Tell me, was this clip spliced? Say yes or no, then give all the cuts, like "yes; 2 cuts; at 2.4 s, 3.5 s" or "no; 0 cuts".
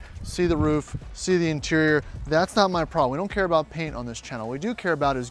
no; 0 cuts